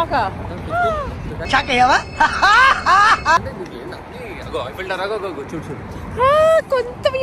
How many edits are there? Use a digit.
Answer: 0